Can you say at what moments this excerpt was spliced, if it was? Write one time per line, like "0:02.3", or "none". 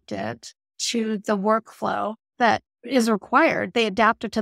0:02.7